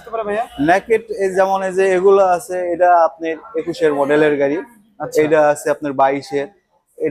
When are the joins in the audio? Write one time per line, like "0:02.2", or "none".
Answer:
none

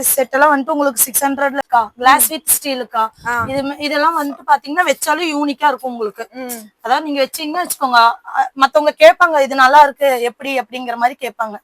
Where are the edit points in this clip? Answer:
0:01.6

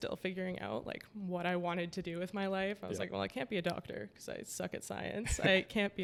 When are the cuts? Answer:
none

